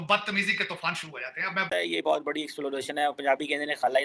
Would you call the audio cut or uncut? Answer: cut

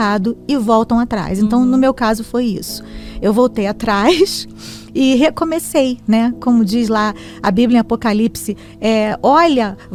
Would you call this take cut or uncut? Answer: uncut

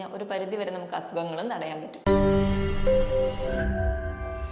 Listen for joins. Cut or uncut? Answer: cut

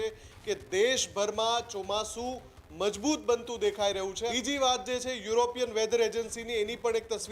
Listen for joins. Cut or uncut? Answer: cut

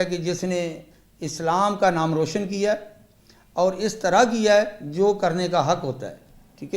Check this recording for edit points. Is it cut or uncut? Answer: uncut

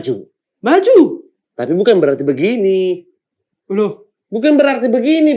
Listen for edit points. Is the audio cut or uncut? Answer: uncut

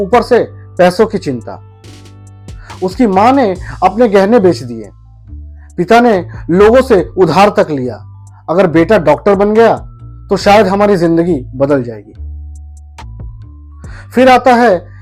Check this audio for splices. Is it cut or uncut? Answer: uncut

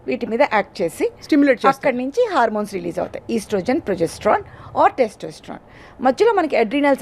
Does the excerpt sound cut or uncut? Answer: uncut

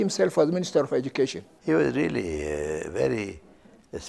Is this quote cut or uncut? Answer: cut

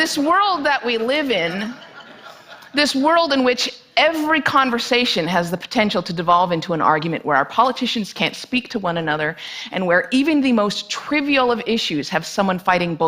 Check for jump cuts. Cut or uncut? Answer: cut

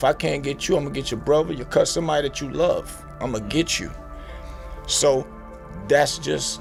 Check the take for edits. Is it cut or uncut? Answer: uncut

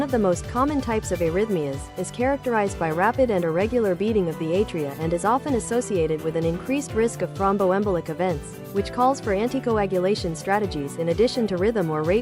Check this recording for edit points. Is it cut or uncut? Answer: uncut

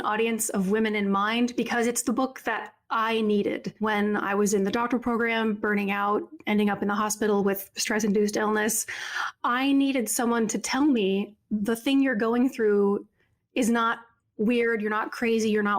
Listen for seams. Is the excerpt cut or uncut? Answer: cut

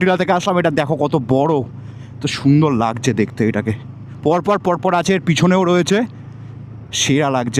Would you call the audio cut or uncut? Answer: uncut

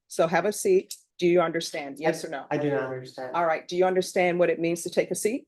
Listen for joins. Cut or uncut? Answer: cut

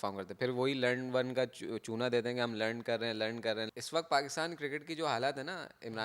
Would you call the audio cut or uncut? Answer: cut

